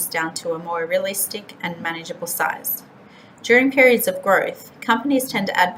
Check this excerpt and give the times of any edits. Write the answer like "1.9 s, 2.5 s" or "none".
none